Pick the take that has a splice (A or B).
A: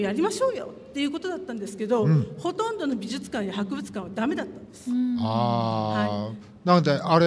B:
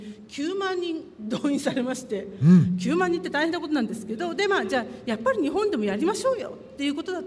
B